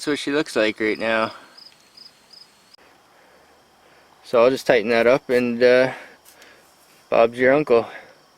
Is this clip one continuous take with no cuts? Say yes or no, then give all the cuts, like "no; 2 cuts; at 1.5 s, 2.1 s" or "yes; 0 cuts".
no; 1 cut; at 2.8 s